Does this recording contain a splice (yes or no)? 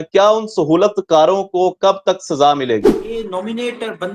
yes